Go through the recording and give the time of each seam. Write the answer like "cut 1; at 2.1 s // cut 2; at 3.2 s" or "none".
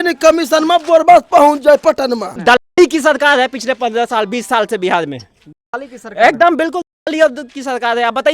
cut 1; at 2.4 s